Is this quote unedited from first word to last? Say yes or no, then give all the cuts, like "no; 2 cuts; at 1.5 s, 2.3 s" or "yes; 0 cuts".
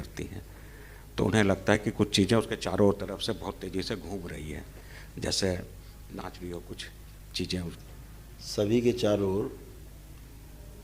no; 1 cut; at 7.8 s